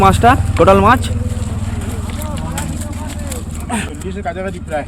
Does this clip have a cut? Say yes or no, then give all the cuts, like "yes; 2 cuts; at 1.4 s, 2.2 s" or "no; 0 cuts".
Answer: yes; 1 cut; at 3.9 s